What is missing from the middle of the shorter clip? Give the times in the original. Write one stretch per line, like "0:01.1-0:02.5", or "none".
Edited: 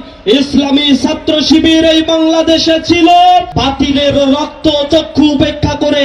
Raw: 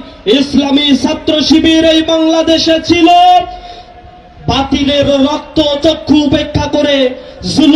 0:03.5-0:04.4